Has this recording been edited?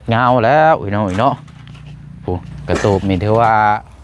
yes; 1 cut; at 2.5 s

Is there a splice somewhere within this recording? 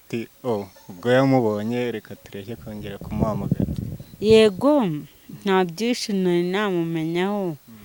no; 0 cuts

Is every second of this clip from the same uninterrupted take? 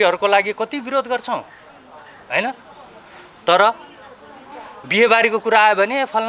yes; 0 cuts

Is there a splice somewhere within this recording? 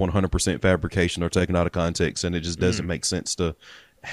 no; 0 cuts

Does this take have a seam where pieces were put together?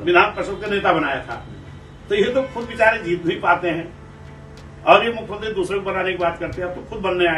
no; 0 cuts

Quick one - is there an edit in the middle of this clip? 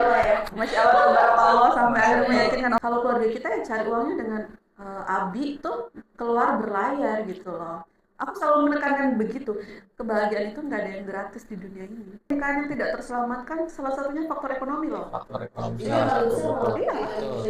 yes; 2 cuts; at 2.8 s, 12.3 s

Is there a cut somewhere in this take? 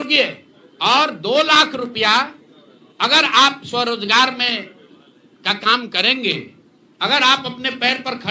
no; 0 cuts

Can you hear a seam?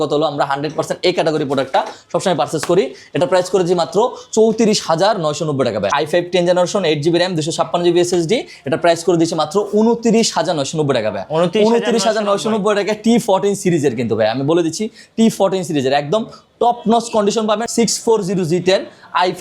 yes; 2 cuts; at 5.9 s, 17.7 s

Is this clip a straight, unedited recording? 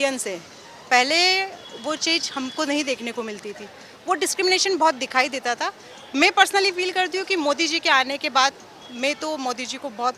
yes; 0 cuts

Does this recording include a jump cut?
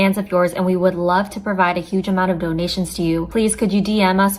yes; 1 cut; at 2.9 s

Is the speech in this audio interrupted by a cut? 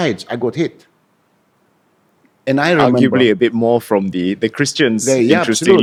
no; 0 cuts

